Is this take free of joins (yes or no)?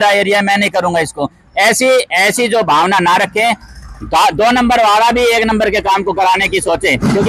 yes